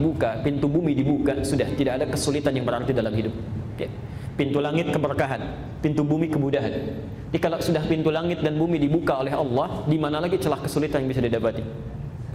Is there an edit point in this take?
no; 0 cuts

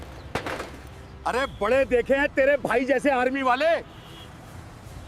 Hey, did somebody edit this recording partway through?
yes; 1 cut; at 1.2 s

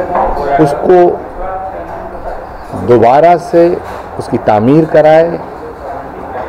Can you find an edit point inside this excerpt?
no; 0 cuts

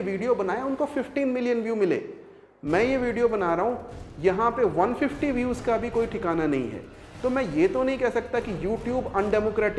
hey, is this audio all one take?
yes; 0 cuts

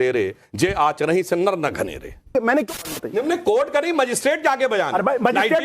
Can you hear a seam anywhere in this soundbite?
yes; 1 cut; at 2.8 s

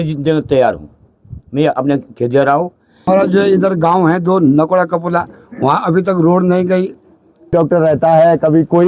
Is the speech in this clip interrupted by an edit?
yes; 2 cuts; at 3.1 s, 7.5 s

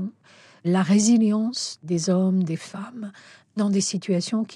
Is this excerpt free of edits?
yes; 0 cuts

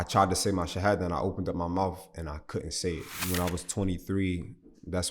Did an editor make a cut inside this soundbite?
yes; 1 cut; at 3.2 s

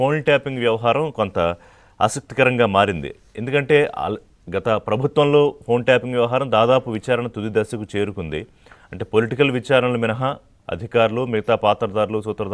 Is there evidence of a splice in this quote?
yes; 1 cut; at 1.4 s

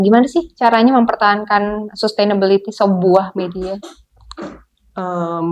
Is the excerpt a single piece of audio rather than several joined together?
yes; 0 cuts

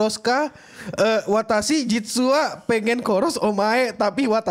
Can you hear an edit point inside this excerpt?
no; 0 cuts

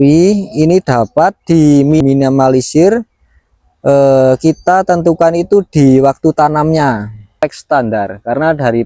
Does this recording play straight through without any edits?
no; 2 cuts; at 2.0 s, 7.4 s

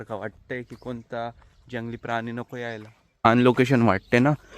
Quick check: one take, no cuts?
no; 1 cut; at 3.3 s

